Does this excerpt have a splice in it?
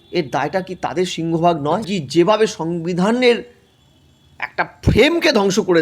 yes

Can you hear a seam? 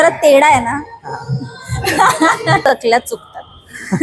yes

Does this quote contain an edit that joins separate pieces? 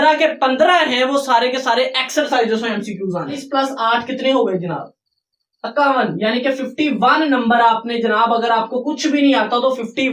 yes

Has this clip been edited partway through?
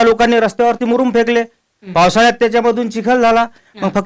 no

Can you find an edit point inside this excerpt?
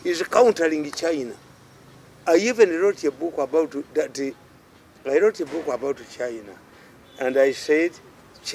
no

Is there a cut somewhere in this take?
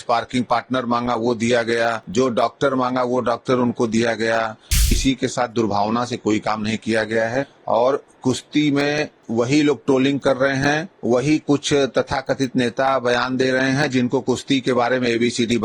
yes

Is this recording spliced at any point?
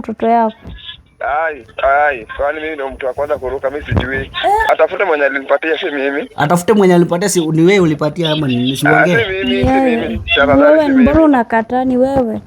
yes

